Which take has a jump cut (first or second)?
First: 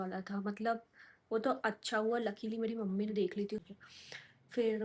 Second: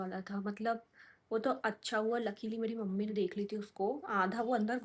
first